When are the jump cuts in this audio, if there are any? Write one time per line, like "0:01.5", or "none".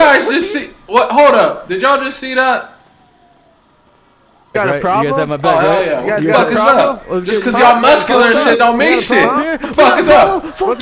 0:04.5